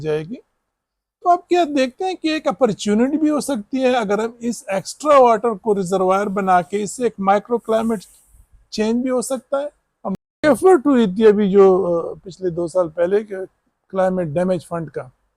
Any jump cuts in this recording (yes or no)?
yes